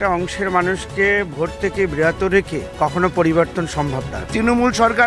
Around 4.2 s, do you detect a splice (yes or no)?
yes